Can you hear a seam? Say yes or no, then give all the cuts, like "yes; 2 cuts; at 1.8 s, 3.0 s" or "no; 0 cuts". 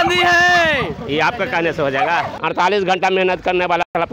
yes; 1 cut; at 2.3 s